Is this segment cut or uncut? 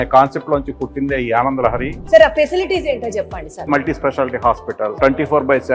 cut